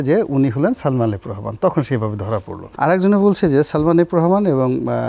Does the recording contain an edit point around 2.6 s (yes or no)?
yes